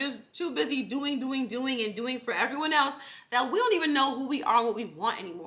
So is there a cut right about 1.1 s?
no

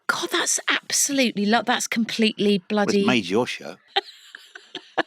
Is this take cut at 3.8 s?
yes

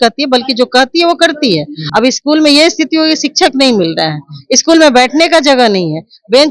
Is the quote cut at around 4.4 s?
no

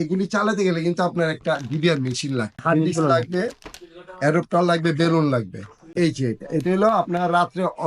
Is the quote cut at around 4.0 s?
no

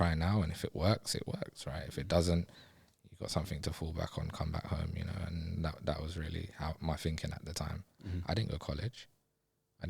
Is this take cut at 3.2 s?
no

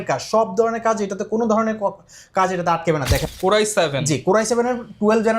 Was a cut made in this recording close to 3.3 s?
yes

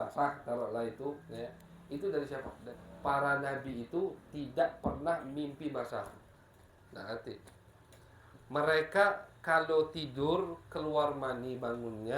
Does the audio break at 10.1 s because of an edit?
no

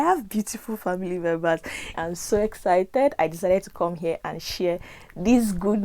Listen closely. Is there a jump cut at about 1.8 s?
yes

